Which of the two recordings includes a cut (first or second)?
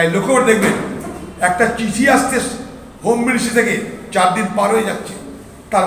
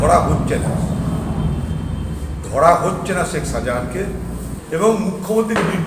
second